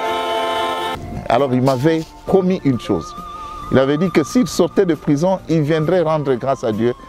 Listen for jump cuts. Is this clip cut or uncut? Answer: cut